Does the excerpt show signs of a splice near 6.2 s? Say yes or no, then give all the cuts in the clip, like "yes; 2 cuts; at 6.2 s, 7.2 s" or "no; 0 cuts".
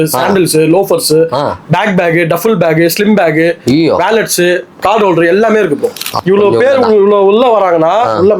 yes; 1 cut; at 6.2 s